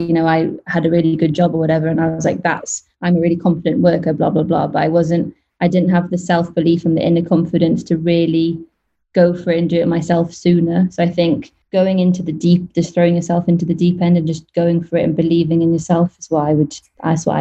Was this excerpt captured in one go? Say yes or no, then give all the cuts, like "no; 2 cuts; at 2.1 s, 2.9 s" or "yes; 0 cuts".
no; 1 cut; at 11.6 s